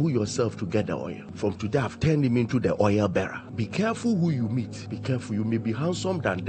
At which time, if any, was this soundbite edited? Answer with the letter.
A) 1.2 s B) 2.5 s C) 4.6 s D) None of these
A